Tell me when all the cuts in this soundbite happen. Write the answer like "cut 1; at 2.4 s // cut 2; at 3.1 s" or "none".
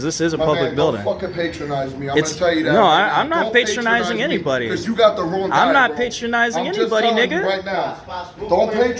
none